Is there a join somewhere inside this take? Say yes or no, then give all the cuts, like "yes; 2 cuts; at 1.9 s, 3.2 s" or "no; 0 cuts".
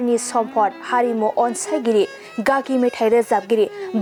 no; 0 cuts